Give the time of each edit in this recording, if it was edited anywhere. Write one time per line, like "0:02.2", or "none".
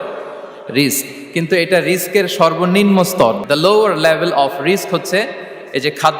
0:03.4